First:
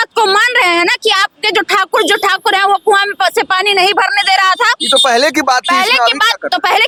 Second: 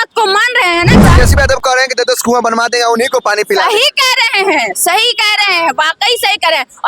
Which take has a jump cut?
second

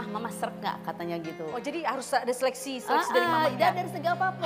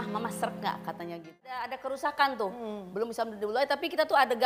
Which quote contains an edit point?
second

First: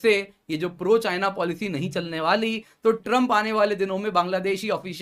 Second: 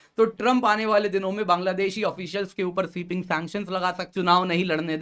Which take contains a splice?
second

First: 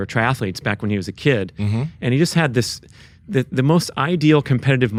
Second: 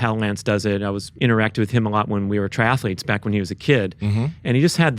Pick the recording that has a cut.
second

